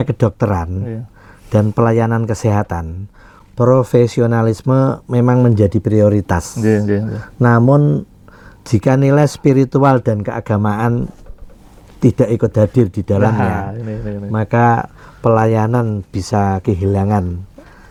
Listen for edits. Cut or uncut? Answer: uncut